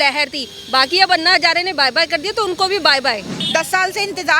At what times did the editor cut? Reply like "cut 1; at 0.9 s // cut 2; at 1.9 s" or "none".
cut 1; at 3.4 s